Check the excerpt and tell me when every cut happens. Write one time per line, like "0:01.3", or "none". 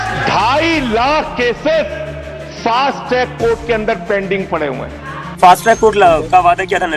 0:05.2